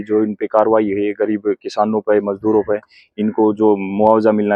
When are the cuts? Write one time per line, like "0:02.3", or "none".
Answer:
none